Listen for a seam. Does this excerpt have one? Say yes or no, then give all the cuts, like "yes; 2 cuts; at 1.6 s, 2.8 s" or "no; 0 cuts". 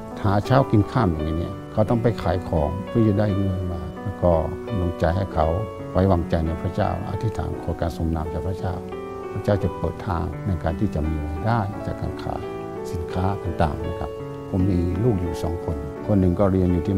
no; 0 cuts